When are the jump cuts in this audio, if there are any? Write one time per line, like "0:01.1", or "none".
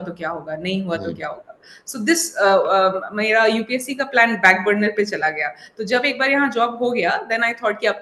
none

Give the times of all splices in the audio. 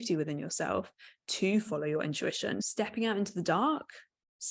0:02.7

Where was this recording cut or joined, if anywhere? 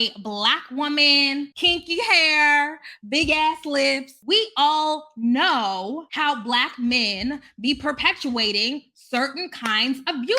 0:01.5

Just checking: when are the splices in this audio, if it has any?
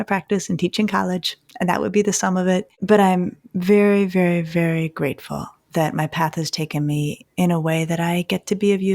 0:02.7
0:07.2

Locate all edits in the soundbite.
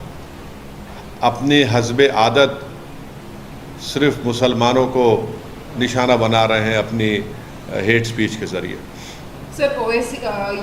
none

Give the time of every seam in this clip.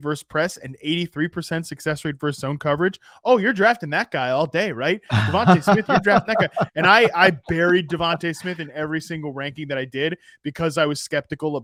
none

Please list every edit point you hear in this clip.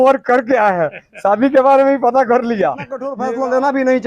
0:03.1

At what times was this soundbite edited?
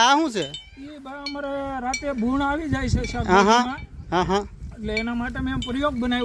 none

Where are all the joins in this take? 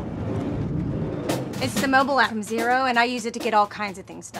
0:03.0

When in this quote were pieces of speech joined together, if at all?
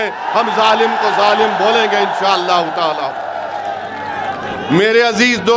none

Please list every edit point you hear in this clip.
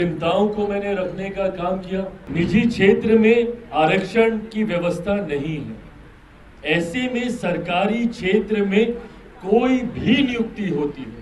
0:02.2

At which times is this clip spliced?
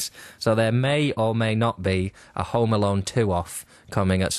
0:01.0

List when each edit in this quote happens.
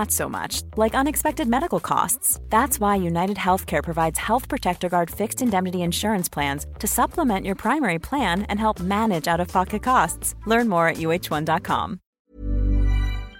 0:12.2

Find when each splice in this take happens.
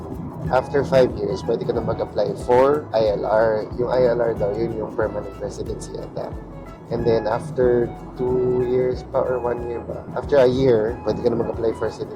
0:10.1

